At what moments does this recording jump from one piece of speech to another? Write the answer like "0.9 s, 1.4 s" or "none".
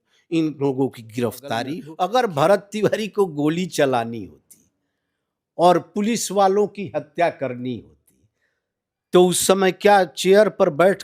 1.8 s